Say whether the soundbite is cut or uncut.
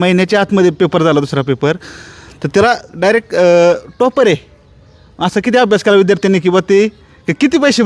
uncut